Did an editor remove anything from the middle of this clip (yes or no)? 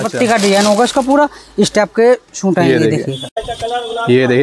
yes